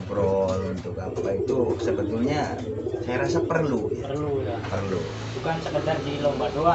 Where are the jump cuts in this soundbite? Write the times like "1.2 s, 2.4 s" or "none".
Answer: none